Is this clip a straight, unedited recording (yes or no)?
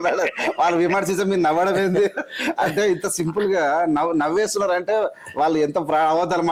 yes